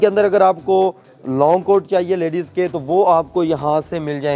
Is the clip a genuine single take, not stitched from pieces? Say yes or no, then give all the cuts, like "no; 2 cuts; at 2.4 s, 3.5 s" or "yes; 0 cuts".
yes; 0 cuts